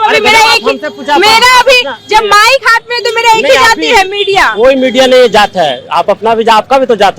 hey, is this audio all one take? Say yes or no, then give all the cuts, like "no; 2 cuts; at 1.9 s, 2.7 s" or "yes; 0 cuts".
yes; 0 cuts